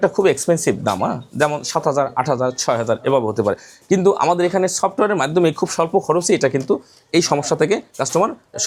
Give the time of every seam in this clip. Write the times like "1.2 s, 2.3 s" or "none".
none